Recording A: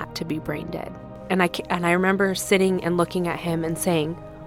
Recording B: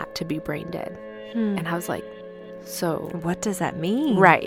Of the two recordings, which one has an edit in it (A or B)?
A